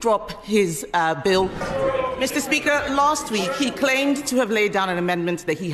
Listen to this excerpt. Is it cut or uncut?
cut